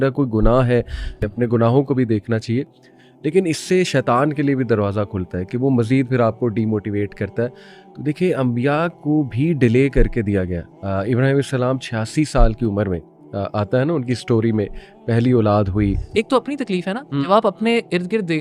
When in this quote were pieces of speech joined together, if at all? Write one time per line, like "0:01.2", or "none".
0:01.2
0:16.0